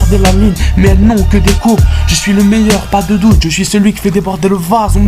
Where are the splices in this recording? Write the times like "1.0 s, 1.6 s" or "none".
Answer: 3.1 s